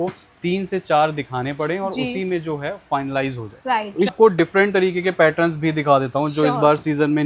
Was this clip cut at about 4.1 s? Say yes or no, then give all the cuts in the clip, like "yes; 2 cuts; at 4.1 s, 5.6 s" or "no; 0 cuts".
yes; 1 cut; at 4.1 s